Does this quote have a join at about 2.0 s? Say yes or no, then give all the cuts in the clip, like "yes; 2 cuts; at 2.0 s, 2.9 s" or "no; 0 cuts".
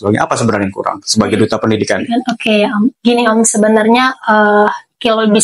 no; 0 cuts